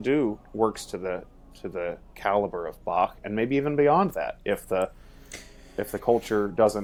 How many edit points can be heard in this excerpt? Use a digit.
0